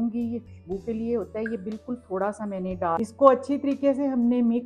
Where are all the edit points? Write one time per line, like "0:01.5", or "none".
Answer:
0:03.0